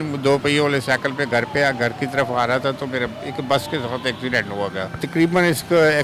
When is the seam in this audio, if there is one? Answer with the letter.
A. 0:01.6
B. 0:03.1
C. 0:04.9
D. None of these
C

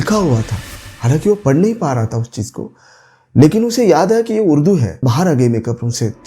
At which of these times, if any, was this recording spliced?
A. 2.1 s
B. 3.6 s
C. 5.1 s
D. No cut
C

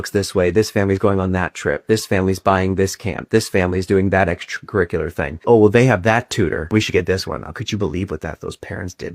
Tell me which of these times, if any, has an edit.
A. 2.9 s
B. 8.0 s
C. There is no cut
B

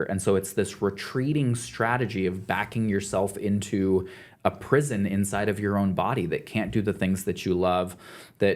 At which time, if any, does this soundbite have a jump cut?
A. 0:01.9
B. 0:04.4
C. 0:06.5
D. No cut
D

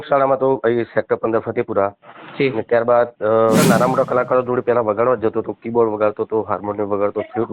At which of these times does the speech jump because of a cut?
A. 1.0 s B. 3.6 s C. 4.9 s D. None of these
B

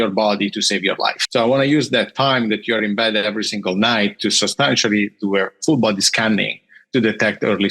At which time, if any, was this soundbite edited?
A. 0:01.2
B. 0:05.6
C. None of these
A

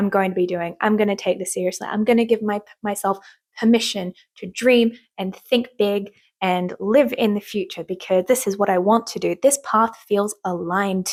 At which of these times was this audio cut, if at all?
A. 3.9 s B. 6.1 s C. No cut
C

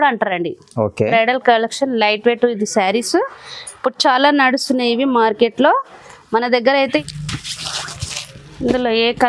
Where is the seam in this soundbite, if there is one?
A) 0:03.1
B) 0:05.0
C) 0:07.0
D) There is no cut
C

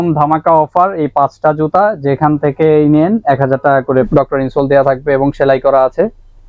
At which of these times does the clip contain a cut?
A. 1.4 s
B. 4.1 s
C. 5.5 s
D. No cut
B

